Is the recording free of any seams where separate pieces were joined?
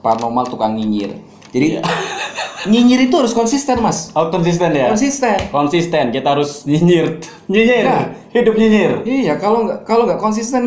yes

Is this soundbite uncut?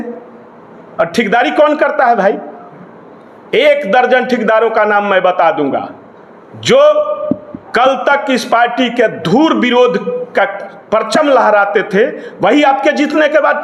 yes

